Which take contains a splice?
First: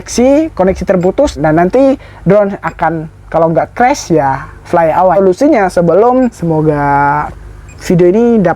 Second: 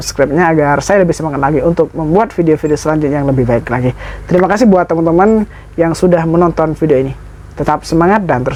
first; 3 cuts; at 1.4 s, 5.2 s, 6.4 s

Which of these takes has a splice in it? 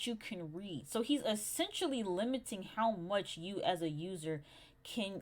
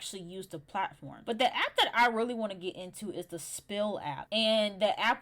second; 2 cuts; at 1.1 s, 4.2 s

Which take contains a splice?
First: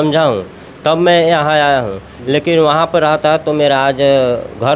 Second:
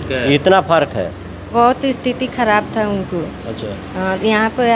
second; 1 cut; at 1.4 s

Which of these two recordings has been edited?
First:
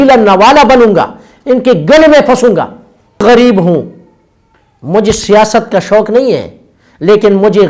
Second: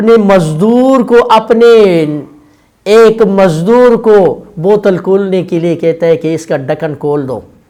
first; 1 cut; at 3.2 s

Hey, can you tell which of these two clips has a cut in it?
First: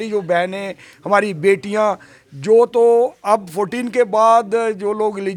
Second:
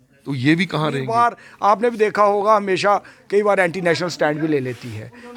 second; 1 cut; at 1.0 s

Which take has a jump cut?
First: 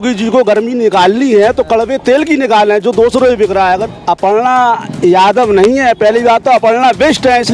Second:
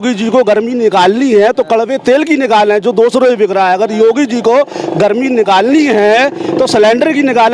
first; 1 cut; at 3.9 s

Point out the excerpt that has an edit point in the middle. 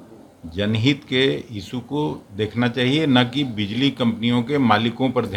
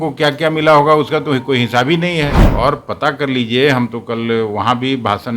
second; 1 cut; at 2.4 s

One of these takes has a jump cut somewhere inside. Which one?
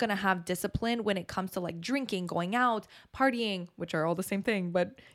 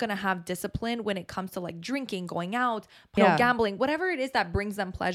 second; 1 cut; at 3.2 s

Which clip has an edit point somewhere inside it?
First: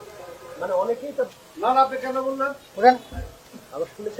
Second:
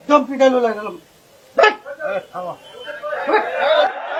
first; 1 cut; at 2.6 s

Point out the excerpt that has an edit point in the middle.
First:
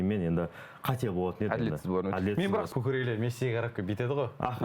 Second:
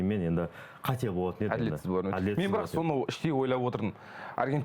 first; 1 cut; at 2.7 s

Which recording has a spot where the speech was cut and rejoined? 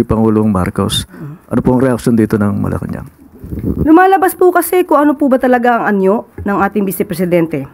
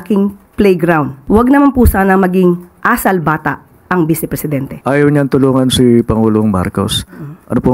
second; 2 cuts; at 1.2 s, 4.7 s

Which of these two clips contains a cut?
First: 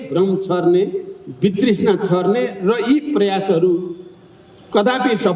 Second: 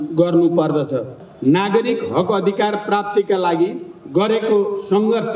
second; 1 cut; at 1.2 s

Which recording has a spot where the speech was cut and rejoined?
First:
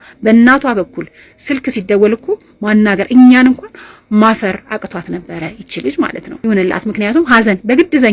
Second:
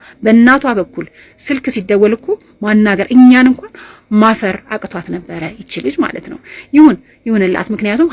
first; 1 cut; at 6.3 s

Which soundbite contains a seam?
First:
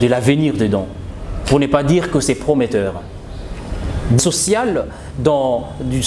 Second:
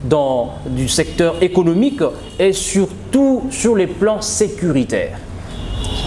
first; 1 cut; at 4.2 s

